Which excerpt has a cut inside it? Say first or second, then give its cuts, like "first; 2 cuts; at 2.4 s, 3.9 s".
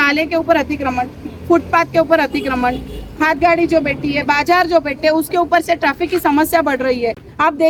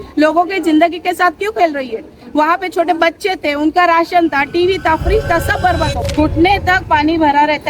second; 1 cut; at 6.0 s